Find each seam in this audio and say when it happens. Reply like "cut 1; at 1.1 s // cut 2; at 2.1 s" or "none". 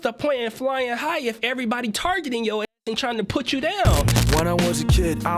cut 1; at 4.0 s